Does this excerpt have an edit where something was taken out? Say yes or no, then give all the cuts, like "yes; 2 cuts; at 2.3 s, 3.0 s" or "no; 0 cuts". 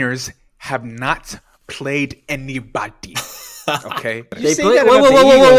yes; 1 cut; at 4.4 s